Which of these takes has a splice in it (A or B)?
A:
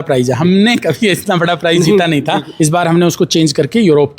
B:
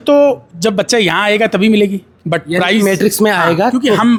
A